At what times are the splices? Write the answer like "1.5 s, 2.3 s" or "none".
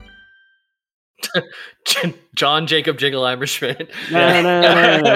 1.2 s